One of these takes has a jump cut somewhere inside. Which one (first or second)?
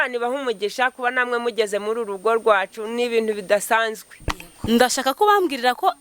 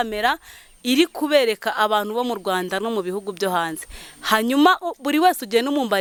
first